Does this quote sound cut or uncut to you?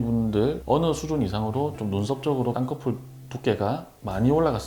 uncut